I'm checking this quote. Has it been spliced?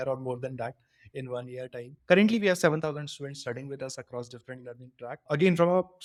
no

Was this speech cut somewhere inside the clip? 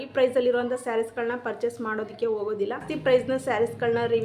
yes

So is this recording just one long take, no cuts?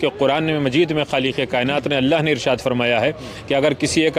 yes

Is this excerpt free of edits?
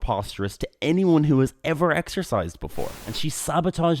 no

